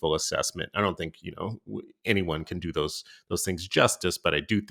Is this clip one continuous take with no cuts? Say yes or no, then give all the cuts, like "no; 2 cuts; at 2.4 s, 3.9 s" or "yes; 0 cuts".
yes; 0 cuts